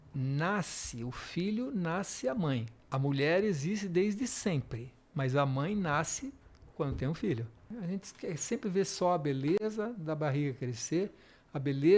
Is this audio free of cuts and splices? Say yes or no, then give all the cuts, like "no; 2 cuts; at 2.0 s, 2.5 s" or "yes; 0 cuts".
no; 2 cuts; at 2.8 s, 7.7 s